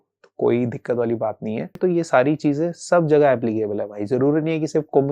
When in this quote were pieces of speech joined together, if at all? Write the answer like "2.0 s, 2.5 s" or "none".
1.7 s